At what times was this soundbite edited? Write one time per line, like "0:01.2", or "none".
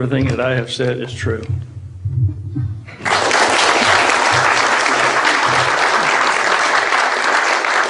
none